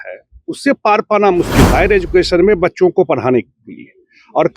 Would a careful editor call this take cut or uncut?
cut